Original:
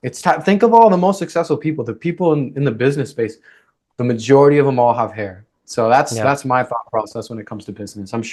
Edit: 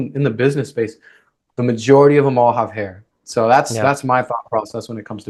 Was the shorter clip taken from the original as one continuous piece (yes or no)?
yes